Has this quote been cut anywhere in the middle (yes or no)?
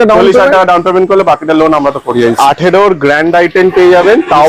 yes